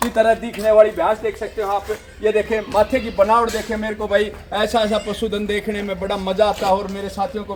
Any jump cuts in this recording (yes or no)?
no